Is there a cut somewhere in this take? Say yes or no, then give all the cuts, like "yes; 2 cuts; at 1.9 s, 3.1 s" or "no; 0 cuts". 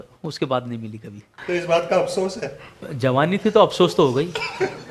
yes; 2 cuts; at 1.3 s, 2.8 s